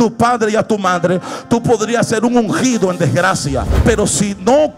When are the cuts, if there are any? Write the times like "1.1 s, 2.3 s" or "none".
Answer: 3.7 s